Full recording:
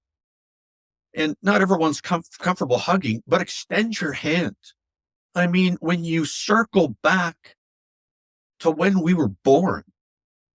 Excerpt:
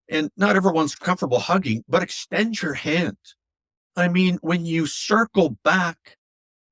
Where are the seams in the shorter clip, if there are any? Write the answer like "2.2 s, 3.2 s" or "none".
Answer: 1.0 s